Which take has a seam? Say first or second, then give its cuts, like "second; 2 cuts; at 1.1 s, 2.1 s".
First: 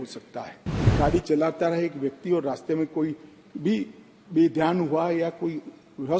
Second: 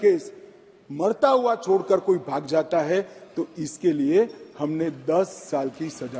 first; 1 cut; at 0.9 s